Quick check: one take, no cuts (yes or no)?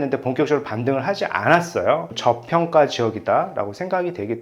no